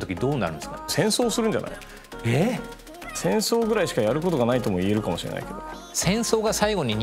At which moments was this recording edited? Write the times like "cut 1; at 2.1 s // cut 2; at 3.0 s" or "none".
cut 1; at 0.9 s // cut 2; at 3.1 s